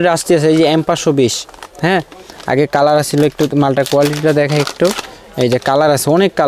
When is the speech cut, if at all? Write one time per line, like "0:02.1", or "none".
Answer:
none